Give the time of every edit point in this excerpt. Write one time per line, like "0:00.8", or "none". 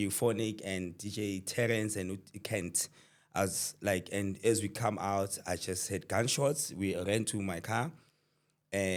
none